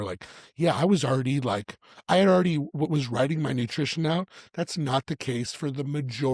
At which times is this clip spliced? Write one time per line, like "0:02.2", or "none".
none

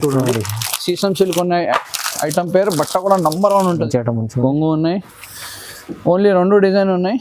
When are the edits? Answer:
0:03.8

